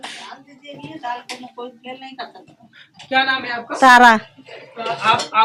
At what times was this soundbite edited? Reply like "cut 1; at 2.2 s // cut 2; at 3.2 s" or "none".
none